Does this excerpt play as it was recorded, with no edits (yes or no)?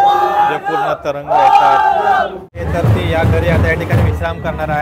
no